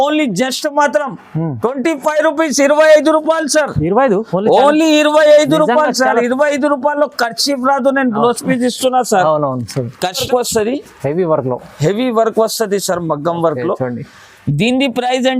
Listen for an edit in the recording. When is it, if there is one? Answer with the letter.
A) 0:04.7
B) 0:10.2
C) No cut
B